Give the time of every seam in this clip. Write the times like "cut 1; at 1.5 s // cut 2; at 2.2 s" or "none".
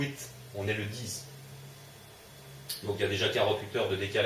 cut 1; at 3.2 s